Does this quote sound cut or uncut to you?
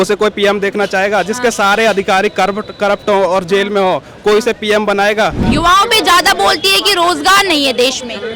cut